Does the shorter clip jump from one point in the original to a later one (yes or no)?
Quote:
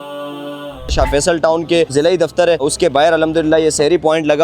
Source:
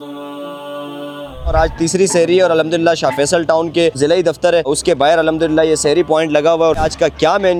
yes